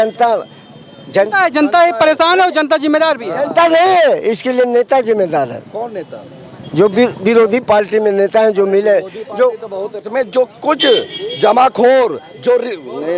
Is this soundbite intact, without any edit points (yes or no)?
no